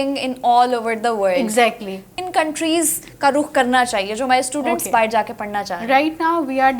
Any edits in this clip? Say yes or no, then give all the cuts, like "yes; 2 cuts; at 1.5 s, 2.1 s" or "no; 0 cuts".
yes; 1 cut; at 2.2 s